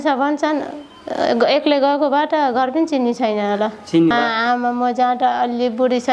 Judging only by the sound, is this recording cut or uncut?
cut